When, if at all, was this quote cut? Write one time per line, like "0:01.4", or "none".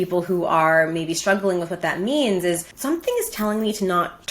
0:02.7